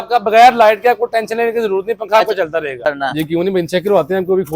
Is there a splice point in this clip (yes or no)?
yes